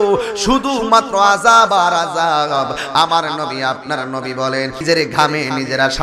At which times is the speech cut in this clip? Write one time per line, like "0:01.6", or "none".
0:04.8